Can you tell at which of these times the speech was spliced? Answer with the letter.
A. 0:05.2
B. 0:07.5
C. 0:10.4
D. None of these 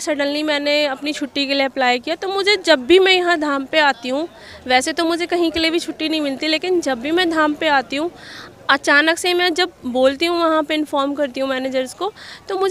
D